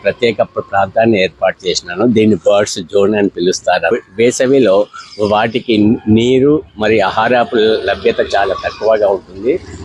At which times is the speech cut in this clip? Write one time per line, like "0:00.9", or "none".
0:03.9